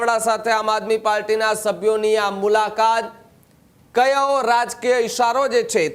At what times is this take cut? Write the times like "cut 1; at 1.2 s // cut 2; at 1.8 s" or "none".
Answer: none